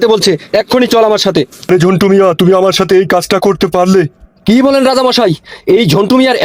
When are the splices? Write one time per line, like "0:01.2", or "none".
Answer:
0:01.6
0:04.4